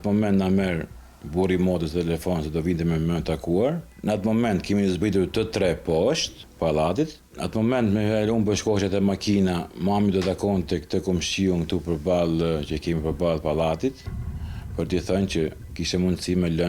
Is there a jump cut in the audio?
no; 0 cuts

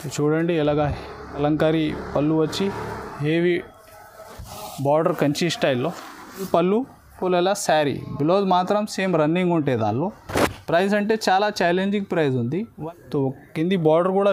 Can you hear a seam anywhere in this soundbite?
yes; 3 cuts; at 1.4 s, 6.5 s, 12.7 s

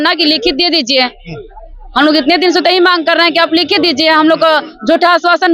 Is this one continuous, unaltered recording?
yes; 0 cuts

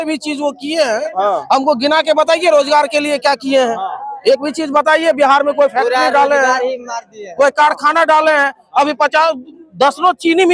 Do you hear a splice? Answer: no; 0 cuts

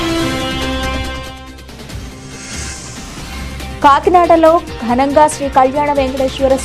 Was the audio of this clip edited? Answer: yes; 2 cuts; at 2.6 s, 3.8 s

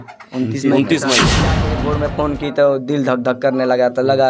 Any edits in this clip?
yes; 1 cut; at 1.7 s

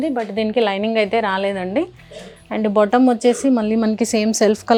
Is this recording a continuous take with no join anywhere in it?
yes; 0 cuts

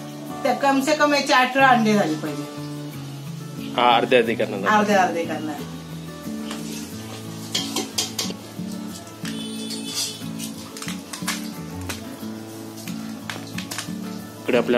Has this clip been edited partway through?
no; 0 cuts

